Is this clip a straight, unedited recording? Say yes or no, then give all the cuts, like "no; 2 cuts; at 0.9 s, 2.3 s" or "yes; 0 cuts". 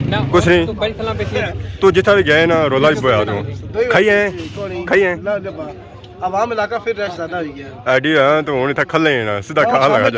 yes; 0 cuts